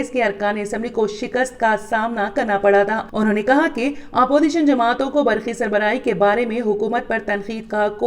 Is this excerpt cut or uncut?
cut